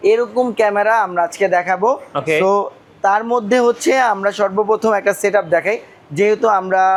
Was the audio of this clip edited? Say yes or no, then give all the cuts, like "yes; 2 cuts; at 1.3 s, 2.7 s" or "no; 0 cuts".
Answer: no; 0 cuts